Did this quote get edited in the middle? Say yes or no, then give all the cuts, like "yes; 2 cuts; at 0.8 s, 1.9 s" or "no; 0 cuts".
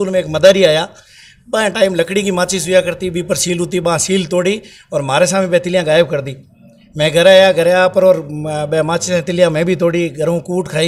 no; 0 cuts